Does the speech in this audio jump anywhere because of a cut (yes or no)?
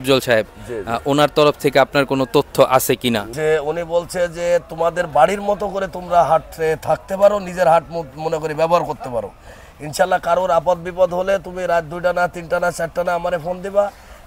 yes